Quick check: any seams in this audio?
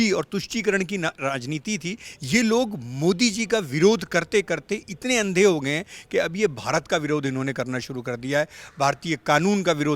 yes; 1 cut; at 2.1 s

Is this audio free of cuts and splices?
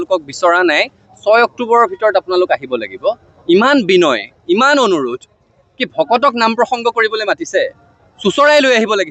yes; 0 cuts

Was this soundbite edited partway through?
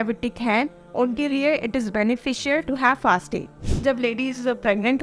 yes; 1 cut; at 3.6 s

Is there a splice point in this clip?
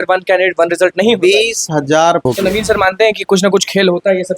yes; 1 cut; at 2.2 s

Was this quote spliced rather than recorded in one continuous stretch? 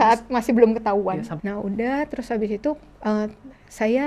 yes; 1 cut; at 1.3 s

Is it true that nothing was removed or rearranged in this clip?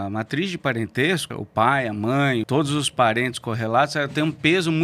no; 2 cuts; at 1.4 s, 2.5 s

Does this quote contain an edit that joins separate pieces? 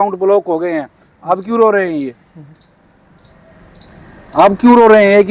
no; 0 cuts

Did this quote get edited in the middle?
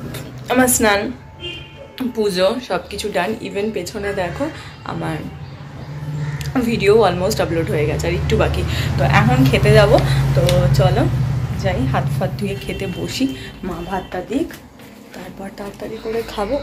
no; 0 cuts

